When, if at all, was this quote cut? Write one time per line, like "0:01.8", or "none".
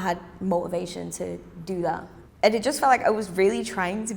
0:02.1